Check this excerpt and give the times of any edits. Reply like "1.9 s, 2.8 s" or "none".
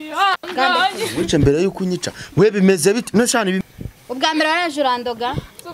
3.6 s